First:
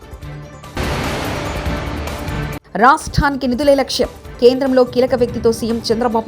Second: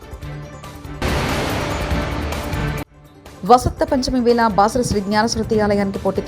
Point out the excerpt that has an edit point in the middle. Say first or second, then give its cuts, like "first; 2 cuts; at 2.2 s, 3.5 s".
second; 2 cuts; at 0.8 s, 2.8 s